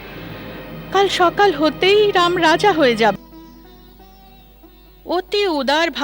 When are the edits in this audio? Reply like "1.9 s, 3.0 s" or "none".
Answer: 3.1 s